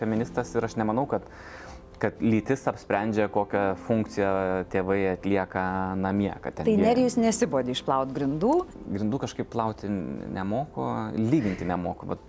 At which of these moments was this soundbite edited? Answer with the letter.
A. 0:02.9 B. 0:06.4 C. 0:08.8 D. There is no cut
C